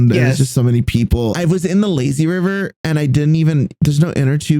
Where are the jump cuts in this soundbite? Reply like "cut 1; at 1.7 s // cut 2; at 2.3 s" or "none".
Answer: cut 1; at 1.3 s